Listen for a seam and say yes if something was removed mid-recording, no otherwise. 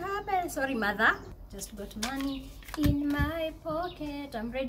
yes